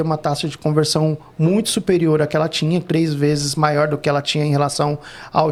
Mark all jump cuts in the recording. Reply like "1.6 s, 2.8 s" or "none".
none